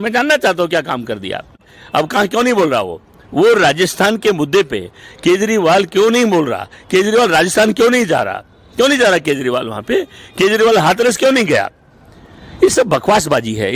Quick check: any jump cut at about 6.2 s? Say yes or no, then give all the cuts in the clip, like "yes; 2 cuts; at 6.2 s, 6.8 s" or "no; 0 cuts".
no; 1 cut; at 1.7 s